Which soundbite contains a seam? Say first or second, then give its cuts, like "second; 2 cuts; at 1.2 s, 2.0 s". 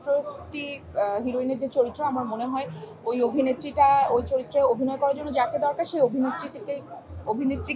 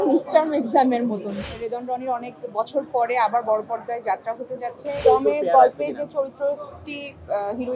second; 2 cuts; at 1.3 s, 5.0 s